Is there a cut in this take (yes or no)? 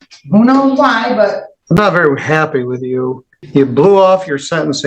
yes